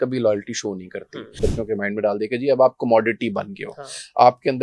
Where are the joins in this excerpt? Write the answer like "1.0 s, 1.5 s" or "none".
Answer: 1.4 s